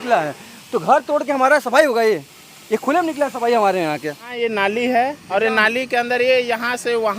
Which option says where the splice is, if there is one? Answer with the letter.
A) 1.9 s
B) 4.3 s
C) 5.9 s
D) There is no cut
B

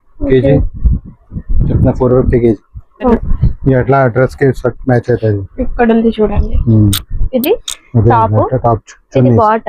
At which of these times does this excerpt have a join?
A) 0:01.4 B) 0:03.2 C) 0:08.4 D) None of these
B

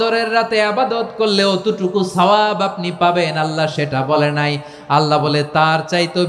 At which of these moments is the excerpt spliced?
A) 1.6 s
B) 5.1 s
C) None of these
C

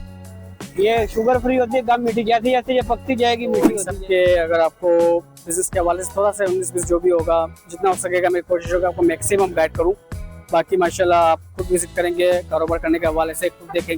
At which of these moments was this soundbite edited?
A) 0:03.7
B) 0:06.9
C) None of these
A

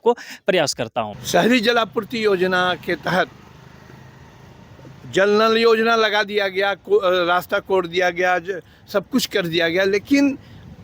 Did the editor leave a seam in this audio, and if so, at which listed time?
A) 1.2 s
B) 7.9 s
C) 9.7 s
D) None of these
A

